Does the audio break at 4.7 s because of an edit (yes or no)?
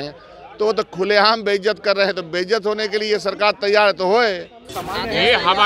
yes